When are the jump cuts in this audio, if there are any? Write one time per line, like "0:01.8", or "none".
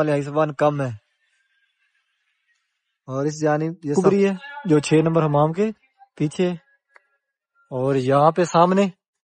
0:03.9